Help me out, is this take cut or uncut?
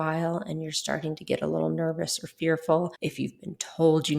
cut